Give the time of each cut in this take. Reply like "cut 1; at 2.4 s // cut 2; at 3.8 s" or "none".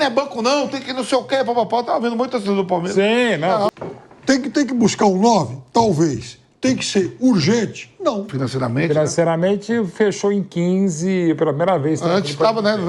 cut 1; at 3.7 s // cut 2; at 8.4 s